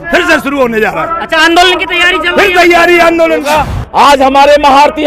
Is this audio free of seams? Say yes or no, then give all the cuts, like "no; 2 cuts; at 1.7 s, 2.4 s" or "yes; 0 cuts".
no; 1 cut; at 3.5 s